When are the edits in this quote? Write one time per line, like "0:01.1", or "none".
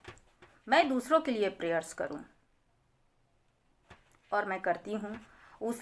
none